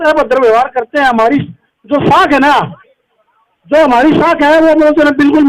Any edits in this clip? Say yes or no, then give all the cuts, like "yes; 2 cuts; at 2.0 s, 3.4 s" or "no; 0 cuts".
no; 0 cuts